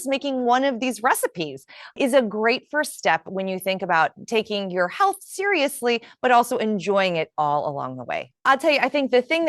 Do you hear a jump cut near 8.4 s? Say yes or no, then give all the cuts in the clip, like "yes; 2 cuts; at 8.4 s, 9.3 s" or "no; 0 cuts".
yes; 1 cut; at 8.4 s